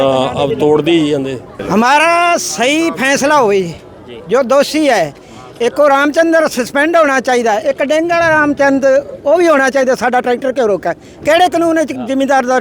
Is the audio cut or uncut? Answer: cut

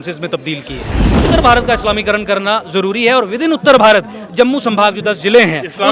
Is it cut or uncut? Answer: cut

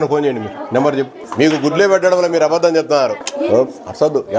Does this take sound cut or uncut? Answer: cut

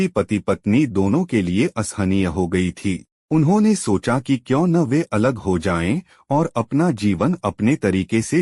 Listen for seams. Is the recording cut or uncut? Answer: cut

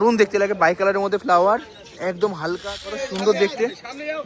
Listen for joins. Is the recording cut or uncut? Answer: cut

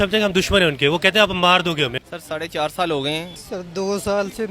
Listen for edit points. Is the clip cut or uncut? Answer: cut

